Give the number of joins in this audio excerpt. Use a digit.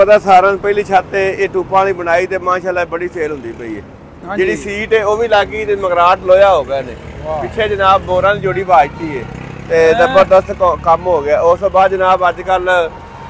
0